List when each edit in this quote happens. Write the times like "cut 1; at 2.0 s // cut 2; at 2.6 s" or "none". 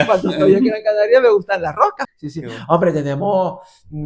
cut 1; at 2.0 s